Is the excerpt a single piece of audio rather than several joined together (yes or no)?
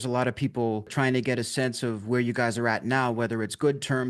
yes